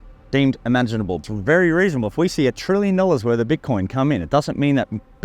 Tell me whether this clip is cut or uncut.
cut